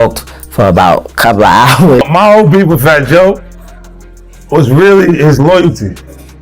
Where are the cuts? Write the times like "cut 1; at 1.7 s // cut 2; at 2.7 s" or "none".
cut 1; at 2.1 s